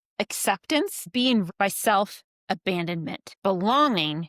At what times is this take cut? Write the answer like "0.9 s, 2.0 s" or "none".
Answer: 1.5 s, 3.2 s